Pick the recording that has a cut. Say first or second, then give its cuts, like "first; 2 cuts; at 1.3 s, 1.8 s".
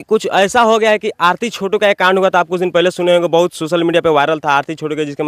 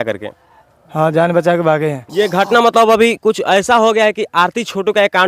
second; 1 cut; at 2.0 s